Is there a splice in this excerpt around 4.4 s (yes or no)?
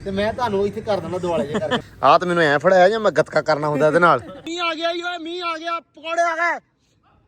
yes